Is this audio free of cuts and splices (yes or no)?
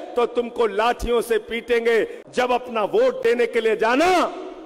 no